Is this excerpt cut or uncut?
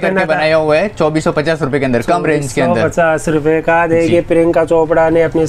uncut